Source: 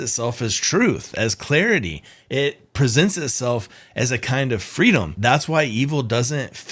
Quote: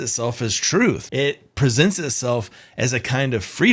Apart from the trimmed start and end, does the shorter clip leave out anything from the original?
yes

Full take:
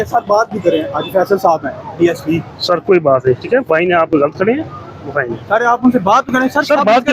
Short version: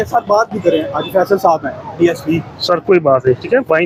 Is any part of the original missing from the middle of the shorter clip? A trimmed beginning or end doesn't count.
no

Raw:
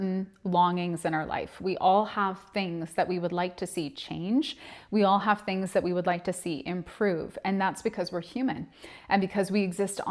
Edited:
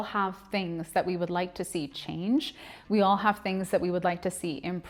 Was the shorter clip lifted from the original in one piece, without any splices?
yes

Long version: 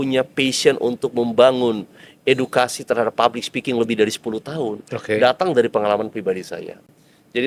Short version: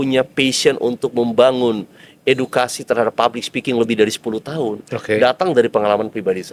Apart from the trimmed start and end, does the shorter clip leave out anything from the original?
no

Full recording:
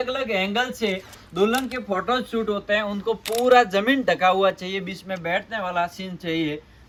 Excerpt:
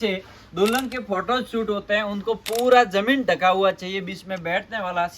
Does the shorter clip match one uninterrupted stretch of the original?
yes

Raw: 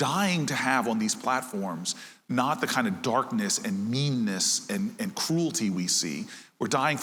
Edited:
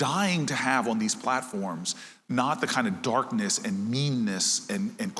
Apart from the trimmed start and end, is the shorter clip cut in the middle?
no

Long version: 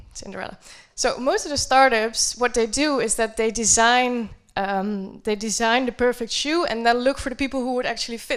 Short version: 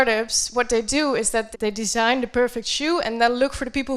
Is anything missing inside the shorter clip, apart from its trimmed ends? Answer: yes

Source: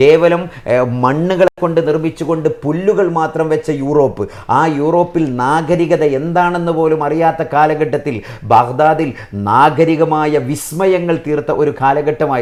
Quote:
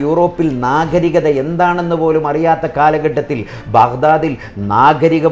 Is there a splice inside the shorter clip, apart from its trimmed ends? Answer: no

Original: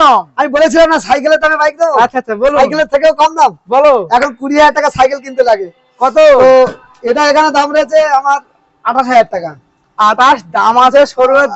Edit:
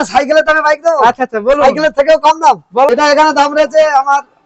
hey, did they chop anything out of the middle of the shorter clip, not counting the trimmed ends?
yes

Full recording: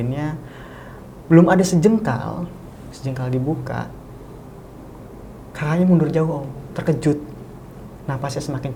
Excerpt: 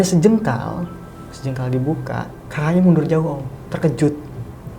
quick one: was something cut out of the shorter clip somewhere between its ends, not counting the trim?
yes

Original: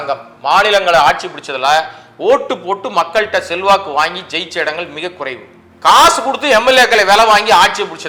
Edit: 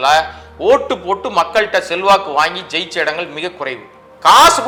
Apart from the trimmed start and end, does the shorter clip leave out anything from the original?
no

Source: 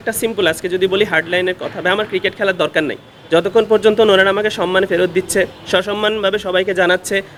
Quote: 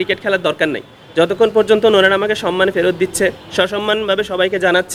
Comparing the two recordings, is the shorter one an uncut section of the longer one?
yes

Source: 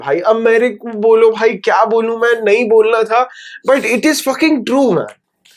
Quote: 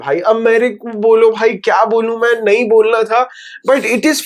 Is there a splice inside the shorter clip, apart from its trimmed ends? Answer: no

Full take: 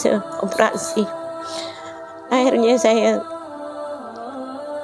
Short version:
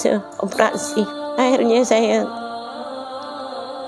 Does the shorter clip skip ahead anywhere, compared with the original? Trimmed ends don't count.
yes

